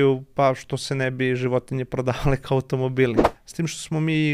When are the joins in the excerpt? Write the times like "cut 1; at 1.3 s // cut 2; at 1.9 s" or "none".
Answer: cut 1; at 3.3 s